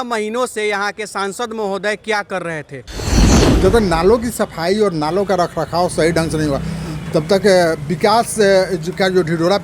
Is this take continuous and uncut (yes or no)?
no